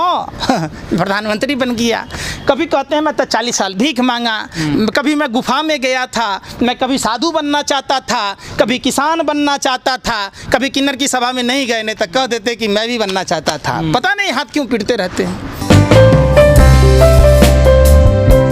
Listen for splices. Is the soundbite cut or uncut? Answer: uncut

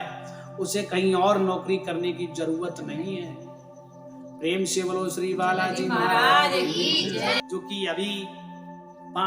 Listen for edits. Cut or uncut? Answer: cut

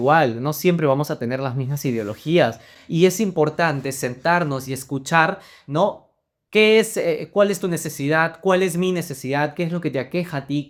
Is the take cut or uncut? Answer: uncut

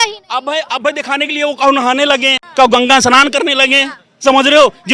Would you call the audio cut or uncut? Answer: cut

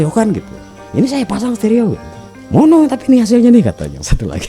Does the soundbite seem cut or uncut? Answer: uncut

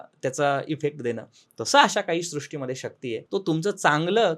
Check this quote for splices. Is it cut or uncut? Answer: cut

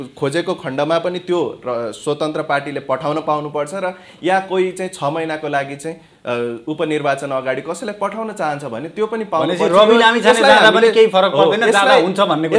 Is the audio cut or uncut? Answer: uncut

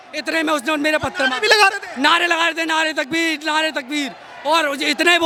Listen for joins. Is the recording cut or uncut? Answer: uncut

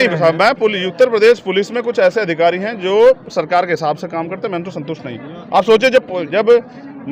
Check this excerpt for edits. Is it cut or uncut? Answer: uncut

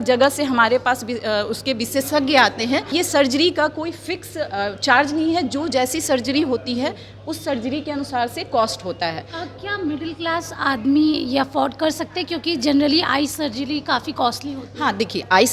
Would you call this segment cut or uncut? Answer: cut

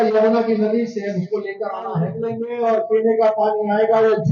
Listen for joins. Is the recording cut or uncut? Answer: cut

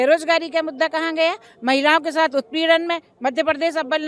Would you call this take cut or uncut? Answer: uncut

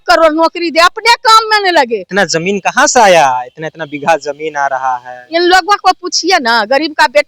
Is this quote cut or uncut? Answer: cut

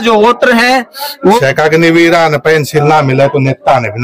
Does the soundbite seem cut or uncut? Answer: cut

